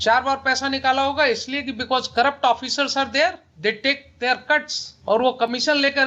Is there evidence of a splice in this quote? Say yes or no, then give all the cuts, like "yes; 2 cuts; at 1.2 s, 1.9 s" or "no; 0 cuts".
no; 0 cuts